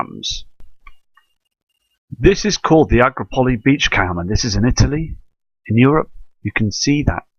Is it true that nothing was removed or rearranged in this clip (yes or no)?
no